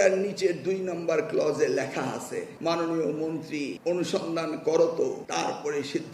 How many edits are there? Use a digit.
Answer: 3